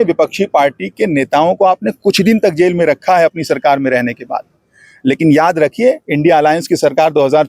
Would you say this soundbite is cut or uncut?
uncut